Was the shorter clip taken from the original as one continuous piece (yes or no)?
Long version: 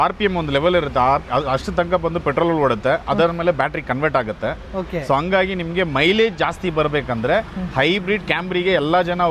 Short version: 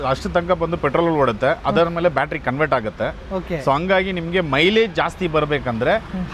yes